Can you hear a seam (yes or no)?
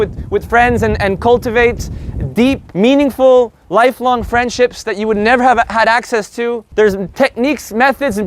yes